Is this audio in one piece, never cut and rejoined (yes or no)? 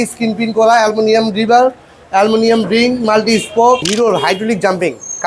no